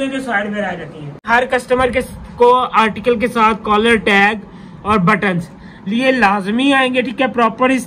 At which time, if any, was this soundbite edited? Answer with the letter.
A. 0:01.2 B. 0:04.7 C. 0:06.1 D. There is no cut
A